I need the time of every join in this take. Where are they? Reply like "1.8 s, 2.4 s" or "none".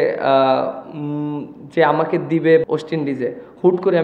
2.7 s